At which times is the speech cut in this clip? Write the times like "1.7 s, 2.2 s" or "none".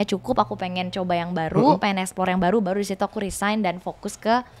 none

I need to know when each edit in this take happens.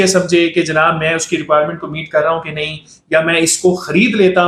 none

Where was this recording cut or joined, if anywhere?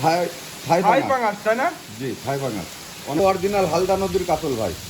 3.2 s

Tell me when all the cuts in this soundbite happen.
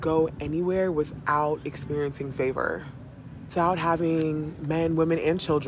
3.5 s

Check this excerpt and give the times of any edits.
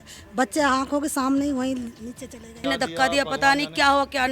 2.6 s

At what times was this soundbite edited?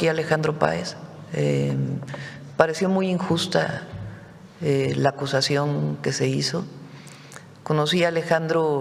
none

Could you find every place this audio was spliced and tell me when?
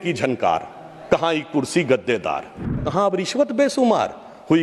2.8 s

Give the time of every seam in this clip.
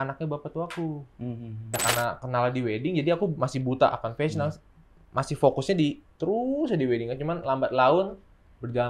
1.6 s

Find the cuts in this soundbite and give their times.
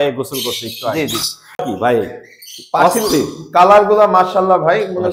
1.6 s

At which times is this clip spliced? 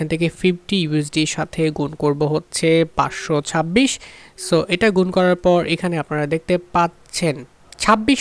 none

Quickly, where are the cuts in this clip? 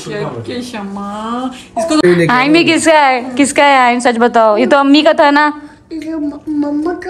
2.0 s

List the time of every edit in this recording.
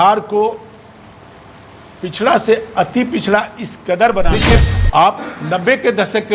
4.4 s

